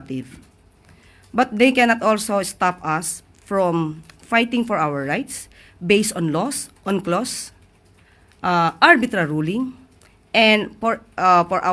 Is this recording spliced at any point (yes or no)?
no